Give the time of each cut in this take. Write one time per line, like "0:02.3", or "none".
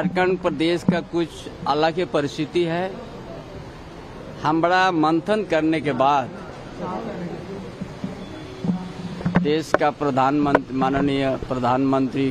0:08.5